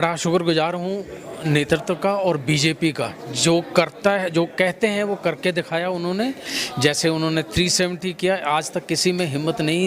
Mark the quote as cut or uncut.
uncut